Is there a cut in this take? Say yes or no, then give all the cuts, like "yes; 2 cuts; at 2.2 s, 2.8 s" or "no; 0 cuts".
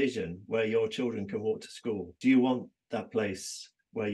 yes; 1 cut; at 2.1 s